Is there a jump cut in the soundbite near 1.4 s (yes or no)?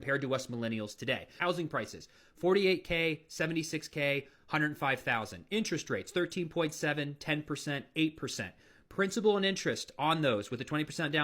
yes